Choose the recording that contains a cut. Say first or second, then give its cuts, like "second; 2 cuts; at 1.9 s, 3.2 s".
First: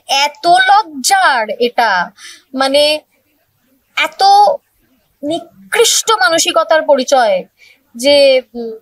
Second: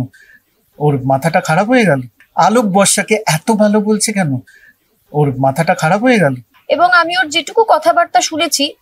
second; 2 cuts; at 2.2 s, 6.5 s